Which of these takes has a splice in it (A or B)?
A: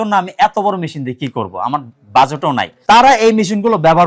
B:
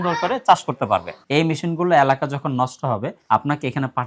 B